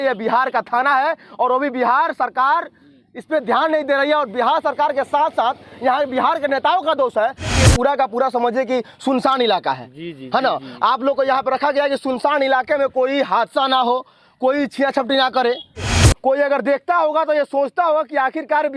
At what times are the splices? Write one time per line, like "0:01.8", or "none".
0:07.6
0:16.0